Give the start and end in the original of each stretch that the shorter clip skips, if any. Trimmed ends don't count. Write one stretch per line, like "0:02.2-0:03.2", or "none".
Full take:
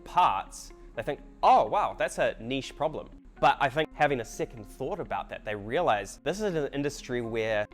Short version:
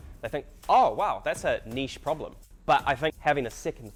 none